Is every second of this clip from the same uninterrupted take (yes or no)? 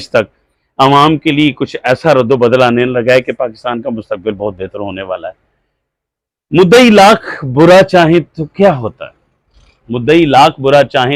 yes